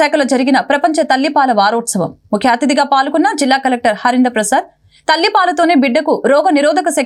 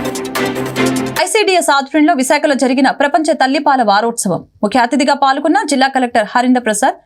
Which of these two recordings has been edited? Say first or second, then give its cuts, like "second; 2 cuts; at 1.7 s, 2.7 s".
second; 1 cut; at 1.1 s